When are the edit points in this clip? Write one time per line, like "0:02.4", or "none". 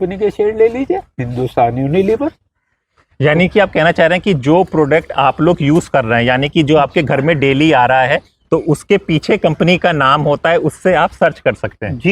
none

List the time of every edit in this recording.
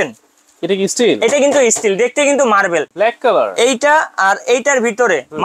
none

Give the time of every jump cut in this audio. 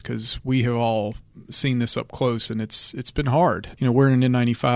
0:03.7

